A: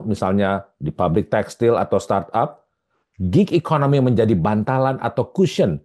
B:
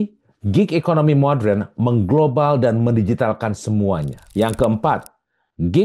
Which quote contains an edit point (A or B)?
B